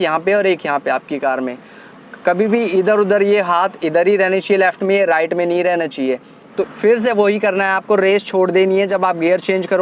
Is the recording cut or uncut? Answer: cut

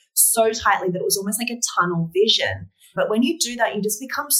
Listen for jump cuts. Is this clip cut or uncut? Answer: cut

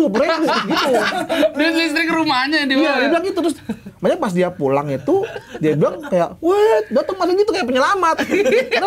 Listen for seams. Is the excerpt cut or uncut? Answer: uncut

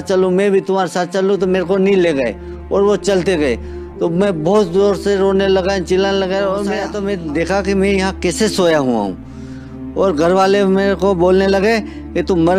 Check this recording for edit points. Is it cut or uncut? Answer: cut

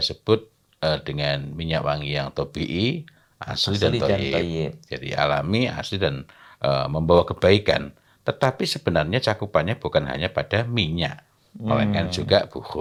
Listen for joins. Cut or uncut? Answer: uncut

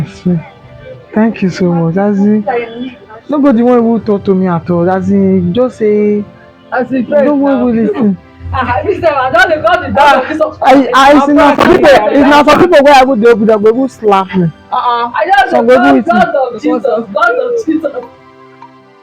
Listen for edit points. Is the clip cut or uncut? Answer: cut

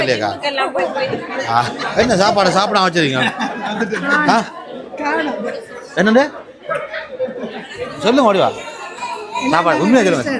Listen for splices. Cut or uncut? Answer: cut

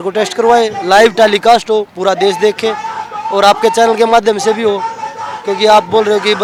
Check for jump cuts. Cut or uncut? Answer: uncut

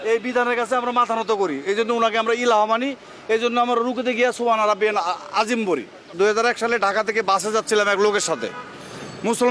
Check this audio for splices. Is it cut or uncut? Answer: cut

